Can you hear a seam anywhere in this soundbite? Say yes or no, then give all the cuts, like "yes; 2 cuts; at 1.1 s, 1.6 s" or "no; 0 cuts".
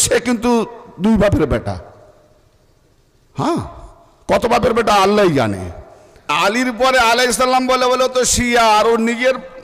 yes; 1 cut; at 6.3 s